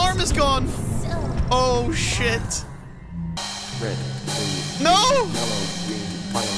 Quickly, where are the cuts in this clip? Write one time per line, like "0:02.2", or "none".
0:03.4